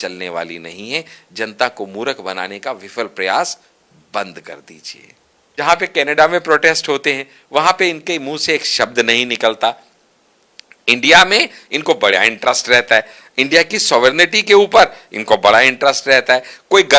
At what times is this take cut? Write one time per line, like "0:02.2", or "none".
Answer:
0:05.4